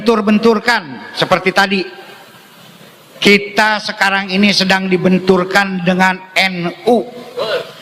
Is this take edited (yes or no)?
no